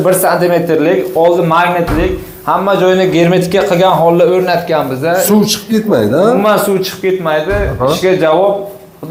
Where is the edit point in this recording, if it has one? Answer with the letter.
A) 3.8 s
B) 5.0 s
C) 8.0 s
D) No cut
D